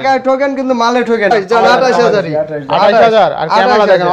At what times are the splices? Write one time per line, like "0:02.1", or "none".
0:01.3